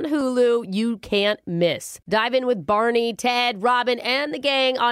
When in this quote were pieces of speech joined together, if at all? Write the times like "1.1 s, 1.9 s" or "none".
none